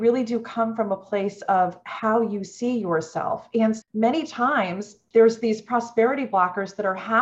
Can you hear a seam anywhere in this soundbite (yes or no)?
yes